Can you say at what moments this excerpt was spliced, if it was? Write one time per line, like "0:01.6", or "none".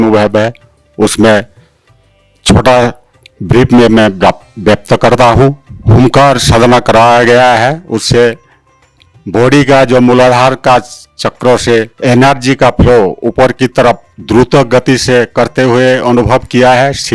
0:05.7
0:11.9